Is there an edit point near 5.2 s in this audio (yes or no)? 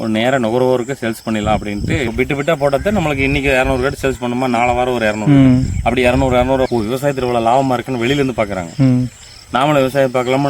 no